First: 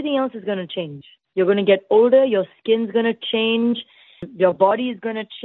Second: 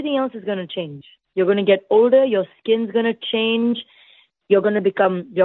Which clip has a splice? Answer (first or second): first